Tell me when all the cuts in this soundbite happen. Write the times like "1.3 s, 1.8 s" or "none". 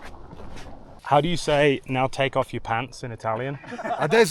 1.0 s